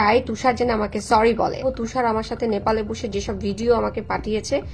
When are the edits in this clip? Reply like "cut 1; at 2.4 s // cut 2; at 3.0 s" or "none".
cut 1; at 1.7 s

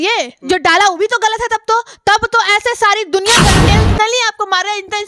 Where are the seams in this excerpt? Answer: cut 1; at 3.5 s

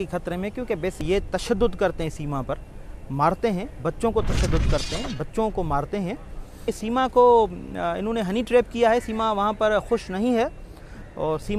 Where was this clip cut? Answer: cut 1; at 1.0 s // cut 2; at 6.7 s

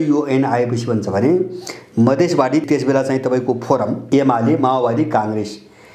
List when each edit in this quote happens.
cut 1; at 2.6 s // cut 2; at 4.1 s

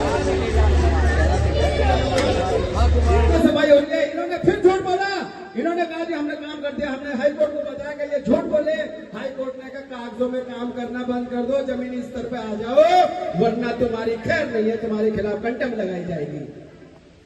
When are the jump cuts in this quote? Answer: cut 1; at 3.4 s

